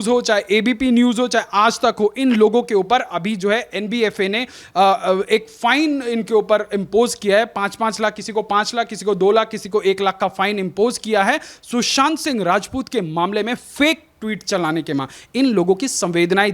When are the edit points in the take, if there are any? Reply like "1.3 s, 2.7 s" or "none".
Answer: none